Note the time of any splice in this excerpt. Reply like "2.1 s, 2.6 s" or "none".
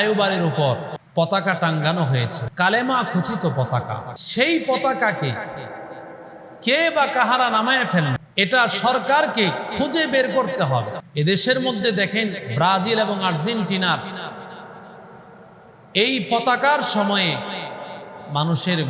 0.9 s, 2.4 s, 4.1 s, 8.2 s, 11.0 s